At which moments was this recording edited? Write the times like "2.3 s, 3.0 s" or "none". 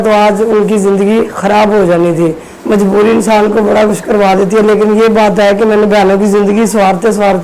2.5 s